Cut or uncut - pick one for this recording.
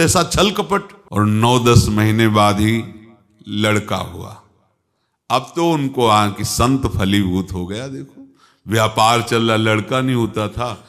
cut